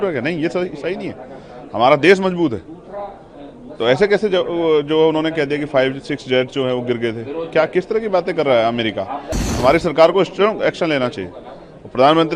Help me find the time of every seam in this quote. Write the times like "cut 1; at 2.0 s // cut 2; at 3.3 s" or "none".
cut 1; at 9.5 s